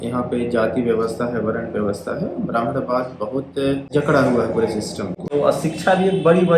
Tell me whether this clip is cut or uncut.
cut